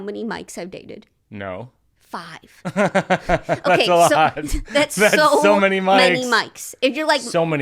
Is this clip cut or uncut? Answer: cut